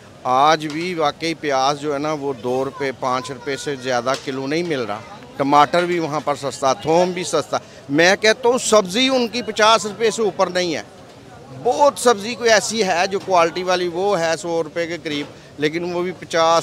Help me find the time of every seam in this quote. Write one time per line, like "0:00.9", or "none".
none

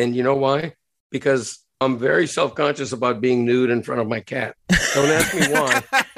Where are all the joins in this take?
none

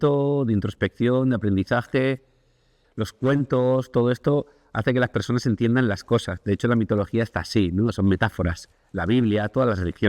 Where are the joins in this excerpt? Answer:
0:02.8

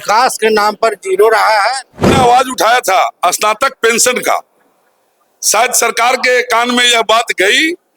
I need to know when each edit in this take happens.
0:02.1

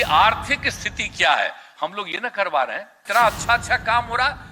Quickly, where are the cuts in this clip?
0:03.0

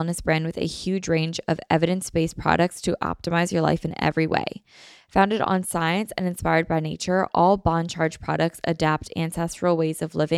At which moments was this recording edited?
none

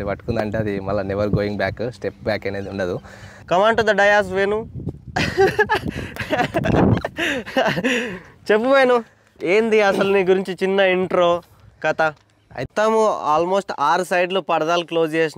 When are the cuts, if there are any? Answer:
0:03.3
0:12.7

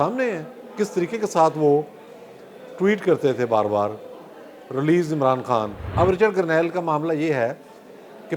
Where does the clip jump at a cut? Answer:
0:05.8

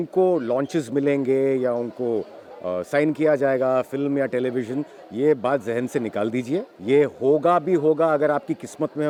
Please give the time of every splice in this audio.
none

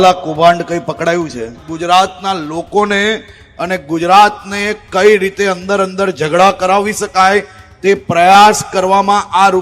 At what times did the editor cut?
0:01.7

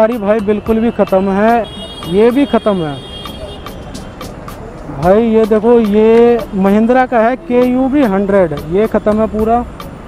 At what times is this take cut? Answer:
0:01.6

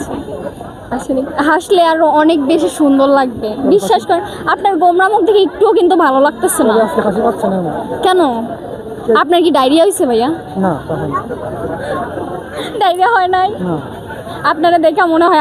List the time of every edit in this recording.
0:03.7
0:10.7
0:12.8

